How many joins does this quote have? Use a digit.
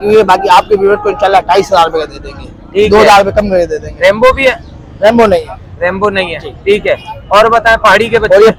0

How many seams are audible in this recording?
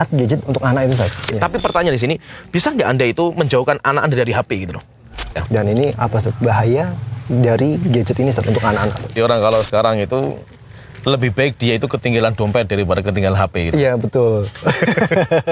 3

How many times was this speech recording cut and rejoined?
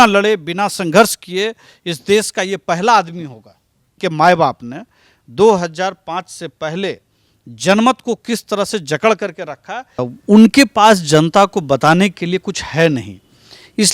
2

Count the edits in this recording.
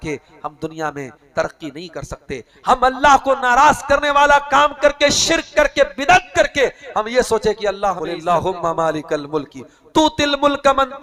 1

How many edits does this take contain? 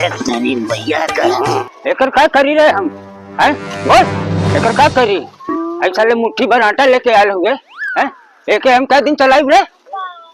1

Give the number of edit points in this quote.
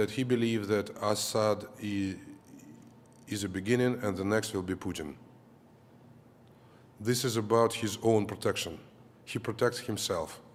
0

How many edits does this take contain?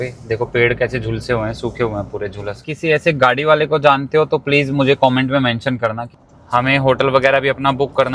2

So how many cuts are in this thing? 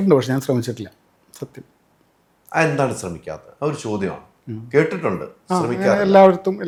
0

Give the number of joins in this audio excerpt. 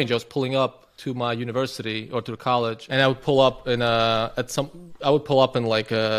1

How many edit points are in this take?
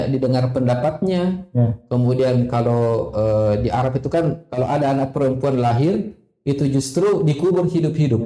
0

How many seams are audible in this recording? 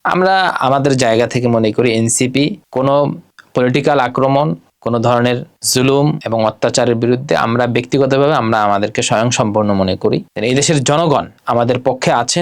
1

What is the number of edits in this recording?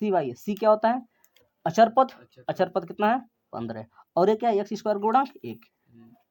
0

